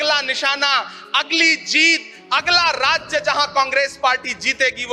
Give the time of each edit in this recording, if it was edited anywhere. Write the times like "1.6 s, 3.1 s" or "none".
none